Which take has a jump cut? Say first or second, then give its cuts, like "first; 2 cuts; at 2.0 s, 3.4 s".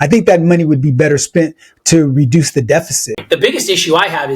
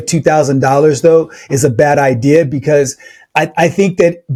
first; 1 cut; at 3.1 s